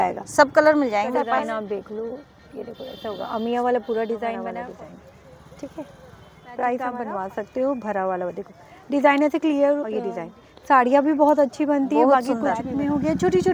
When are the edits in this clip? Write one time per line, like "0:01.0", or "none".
0:01.2
0:04.4
0:06.9
0:10.0
0:12.7